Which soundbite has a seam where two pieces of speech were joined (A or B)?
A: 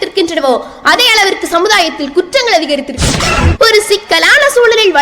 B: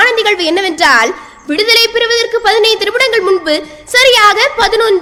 A